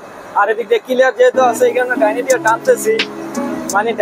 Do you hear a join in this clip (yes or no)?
no